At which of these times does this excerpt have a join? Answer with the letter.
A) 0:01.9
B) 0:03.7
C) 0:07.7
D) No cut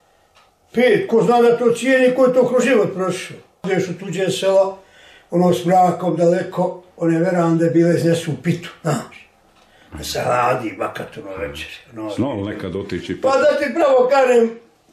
B